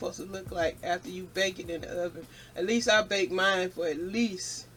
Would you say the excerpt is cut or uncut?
uncut